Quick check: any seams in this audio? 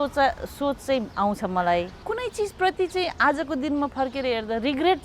yes; 1 cut; at 2.0 s

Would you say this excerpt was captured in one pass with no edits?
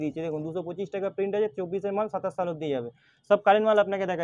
yes; 0 cuts

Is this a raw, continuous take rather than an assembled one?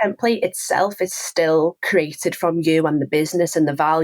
no; 1 cut; at 1.8 s

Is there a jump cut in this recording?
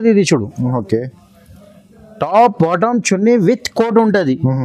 no; 0 cuts

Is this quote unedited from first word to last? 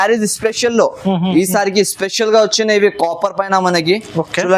no; 1 cut; at 1.3 s

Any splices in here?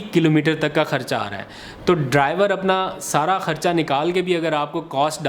no; 0 cuts

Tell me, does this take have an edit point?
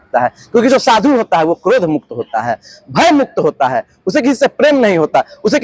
no; 0 cuts

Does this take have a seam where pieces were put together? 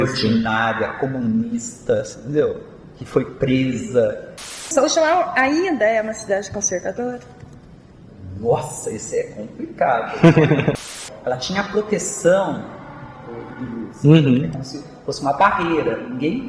yes; 2 cuts; at 4.6 s, 10.7 s

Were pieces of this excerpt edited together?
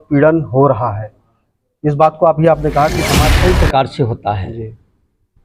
yes; 1 cut; at 3.2 s

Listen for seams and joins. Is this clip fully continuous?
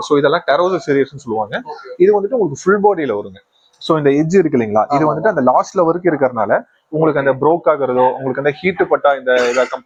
yes; 0 cuts

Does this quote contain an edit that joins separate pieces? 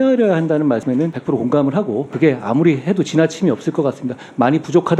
yes; 2 cuts; at 1.0 s, 2.1 s

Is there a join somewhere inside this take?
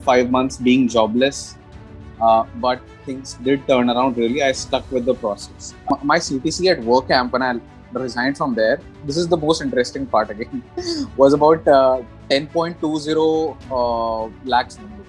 yes; 1 cut; at 5.9 s

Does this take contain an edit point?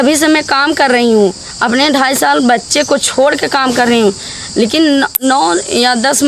no; 0 cuts

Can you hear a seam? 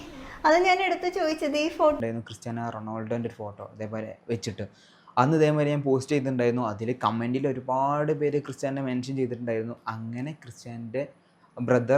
yes; 1 cut; at 2.0 s

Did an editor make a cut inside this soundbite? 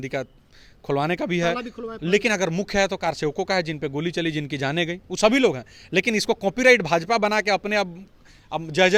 no; 0 cuts

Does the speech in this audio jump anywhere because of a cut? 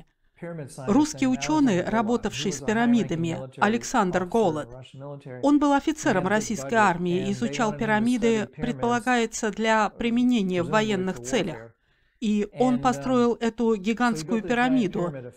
no; 0 cuts

